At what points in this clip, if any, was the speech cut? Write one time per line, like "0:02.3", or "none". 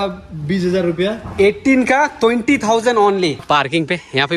0:03.4